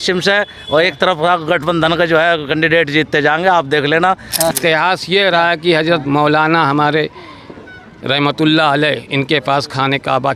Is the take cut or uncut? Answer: cut